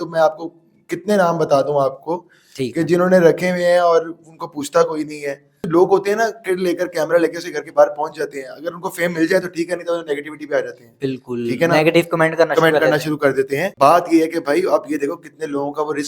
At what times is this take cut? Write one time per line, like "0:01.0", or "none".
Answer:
0:05.6
0:13.7